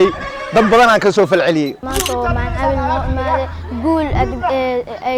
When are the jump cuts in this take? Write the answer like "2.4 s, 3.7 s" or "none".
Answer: 1.8 s